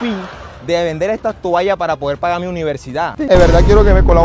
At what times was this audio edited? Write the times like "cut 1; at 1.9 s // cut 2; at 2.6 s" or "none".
cut 1; at 3.1 s